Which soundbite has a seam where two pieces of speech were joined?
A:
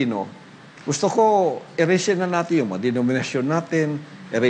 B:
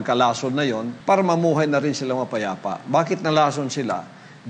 B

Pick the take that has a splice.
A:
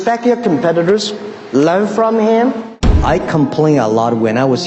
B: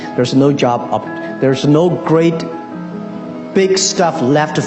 A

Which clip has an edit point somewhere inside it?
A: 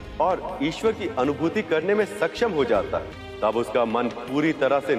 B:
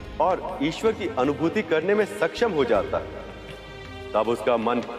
A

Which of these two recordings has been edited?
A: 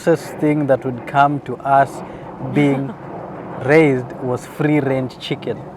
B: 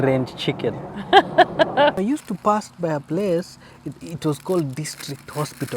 B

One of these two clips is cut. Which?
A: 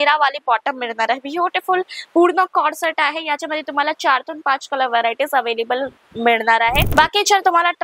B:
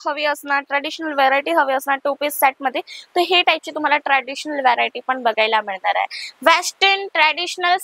A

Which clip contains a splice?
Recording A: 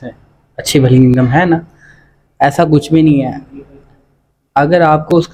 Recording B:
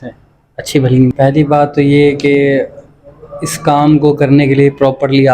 B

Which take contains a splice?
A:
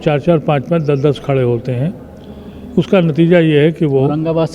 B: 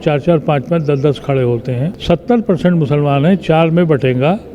B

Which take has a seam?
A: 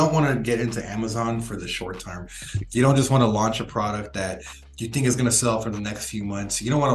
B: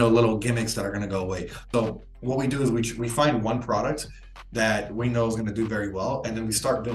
B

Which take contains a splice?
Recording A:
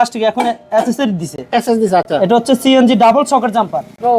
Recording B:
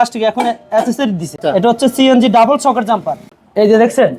B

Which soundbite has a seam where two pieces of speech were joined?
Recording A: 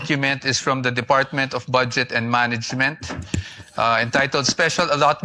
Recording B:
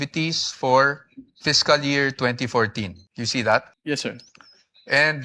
B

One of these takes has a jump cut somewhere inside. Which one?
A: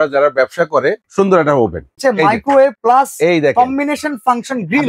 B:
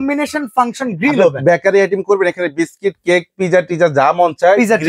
A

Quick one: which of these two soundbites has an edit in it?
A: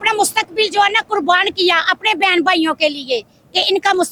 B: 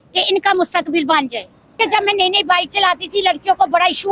B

